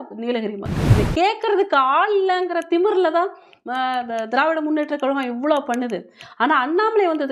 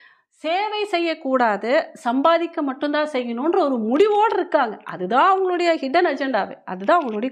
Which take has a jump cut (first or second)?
first